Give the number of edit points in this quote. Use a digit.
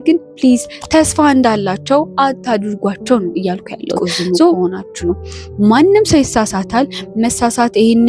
1